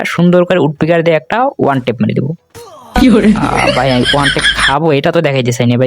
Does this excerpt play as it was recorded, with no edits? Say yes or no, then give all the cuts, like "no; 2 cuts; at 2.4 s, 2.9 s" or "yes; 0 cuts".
yes; 0 cuts